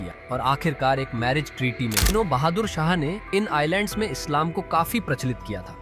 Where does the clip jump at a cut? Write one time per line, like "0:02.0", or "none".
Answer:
0:02.1